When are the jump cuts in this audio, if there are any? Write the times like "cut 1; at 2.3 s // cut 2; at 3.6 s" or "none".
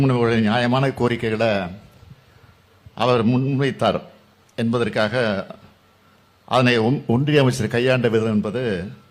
none